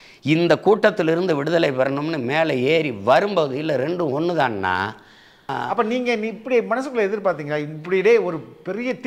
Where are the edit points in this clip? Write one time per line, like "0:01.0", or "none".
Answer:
0:05.6